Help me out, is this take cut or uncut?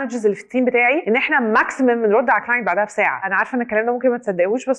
cut